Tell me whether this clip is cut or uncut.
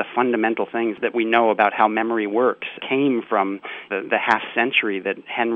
cut